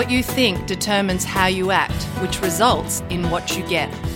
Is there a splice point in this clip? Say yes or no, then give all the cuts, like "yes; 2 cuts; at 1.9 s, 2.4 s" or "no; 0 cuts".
no; 0 cuts